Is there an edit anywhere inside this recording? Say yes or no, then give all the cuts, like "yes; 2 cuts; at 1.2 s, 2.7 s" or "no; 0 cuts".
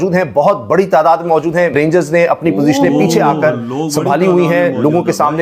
yes; 1 cut; at 1.7 s